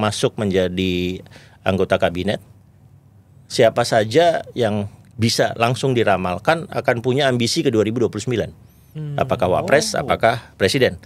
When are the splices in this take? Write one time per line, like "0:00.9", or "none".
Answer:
none